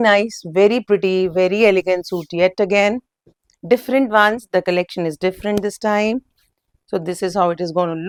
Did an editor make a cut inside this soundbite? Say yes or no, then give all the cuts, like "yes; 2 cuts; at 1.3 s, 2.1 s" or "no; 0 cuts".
no; 0 cuts